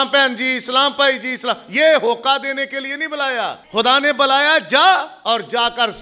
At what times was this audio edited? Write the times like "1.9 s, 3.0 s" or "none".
3.6 s, 5.1 s